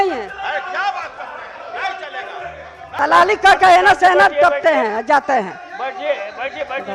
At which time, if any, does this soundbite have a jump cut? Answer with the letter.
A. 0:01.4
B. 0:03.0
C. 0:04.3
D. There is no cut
B